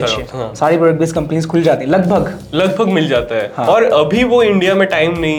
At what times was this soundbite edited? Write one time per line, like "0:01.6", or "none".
none